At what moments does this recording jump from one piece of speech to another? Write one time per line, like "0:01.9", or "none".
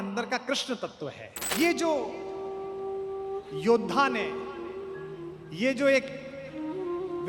0:01.5

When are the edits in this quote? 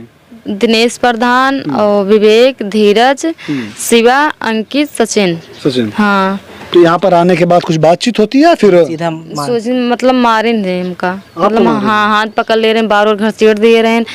none

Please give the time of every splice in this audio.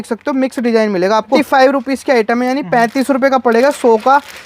0:01.4

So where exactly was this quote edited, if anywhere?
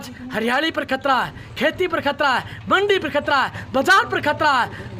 none

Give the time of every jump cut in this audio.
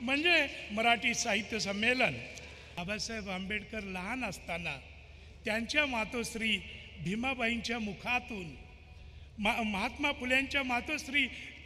0:02.7

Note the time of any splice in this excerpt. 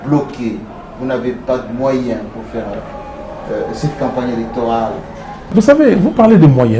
0:05.5

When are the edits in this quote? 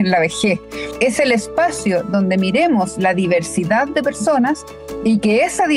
0:00.9

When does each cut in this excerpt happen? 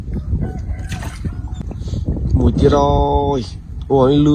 0:01.6

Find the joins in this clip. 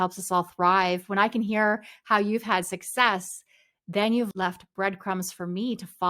0:04.3

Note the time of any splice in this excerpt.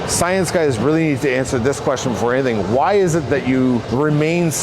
none

